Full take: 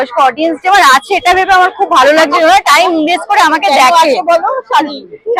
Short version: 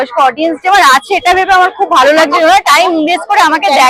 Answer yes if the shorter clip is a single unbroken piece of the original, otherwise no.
yes